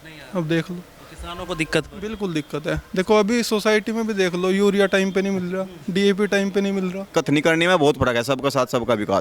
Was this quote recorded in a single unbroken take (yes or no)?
no